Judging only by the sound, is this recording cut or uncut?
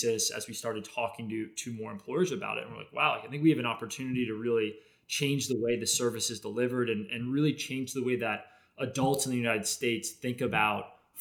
uncut